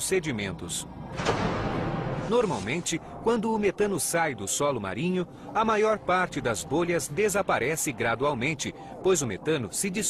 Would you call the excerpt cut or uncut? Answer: cut